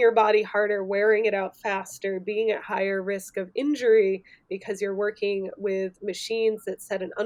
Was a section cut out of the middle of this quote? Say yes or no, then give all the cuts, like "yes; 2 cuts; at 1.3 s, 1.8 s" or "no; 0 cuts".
no; 0 cuts